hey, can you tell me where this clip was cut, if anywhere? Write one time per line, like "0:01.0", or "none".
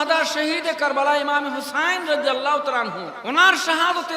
0:03.1